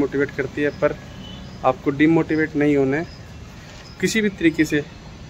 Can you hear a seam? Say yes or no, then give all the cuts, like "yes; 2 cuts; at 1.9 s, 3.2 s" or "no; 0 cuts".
no; 0 cuts